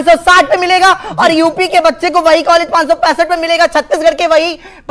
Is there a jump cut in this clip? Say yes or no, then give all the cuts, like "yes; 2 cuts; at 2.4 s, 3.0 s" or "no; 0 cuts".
no; 0 cuts